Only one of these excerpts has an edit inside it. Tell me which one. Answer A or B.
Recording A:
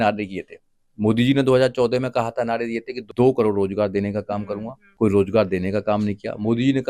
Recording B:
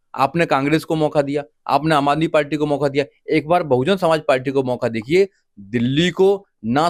A